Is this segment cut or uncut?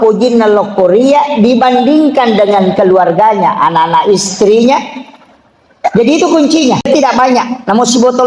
cut